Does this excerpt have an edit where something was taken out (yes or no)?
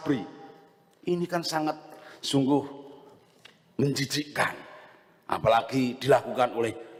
no